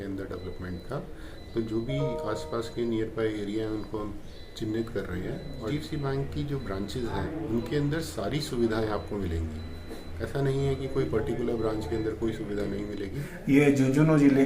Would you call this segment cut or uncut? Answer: cut